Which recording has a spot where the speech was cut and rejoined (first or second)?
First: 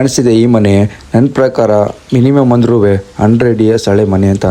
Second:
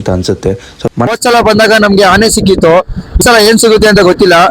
second